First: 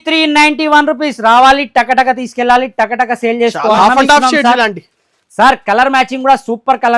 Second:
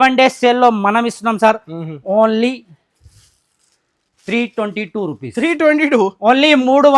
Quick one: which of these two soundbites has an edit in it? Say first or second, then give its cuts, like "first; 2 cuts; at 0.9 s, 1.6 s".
first; 1 cut; at 3.8 s